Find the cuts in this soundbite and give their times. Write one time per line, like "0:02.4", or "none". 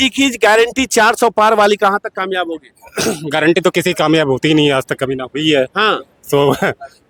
none

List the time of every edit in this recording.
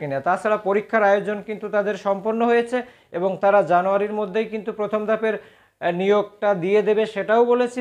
none

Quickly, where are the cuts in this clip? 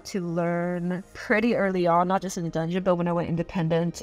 0:01.2

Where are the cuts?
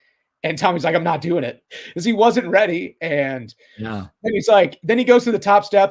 0:01.6

